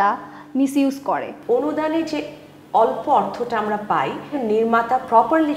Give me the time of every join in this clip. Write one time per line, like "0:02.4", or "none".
0:01.3
0:04.3